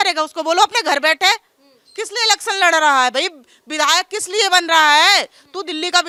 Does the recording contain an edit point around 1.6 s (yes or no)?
no